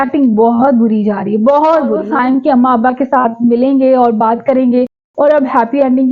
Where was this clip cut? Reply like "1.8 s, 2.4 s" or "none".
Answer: 2.0 s